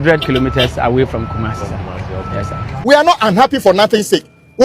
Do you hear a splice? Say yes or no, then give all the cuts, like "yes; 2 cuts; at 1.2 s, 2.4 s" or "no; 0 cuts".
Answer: yes; 1 cut; at 2.8 s